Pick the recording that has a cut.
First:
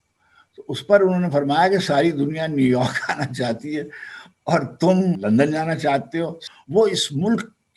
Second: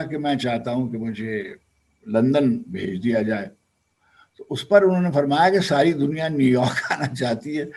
first; 2 cuts; at 5.2 s, 6.4 s

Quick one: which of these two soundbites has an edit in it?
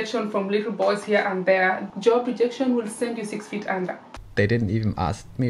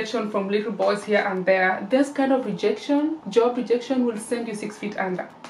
first; 2 cuts; at 1.8 s, 4.1 s

